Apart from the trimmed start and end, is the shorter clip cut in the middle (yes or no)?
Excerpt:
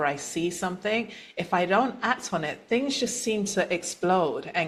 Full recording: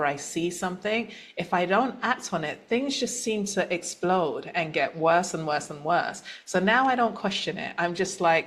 no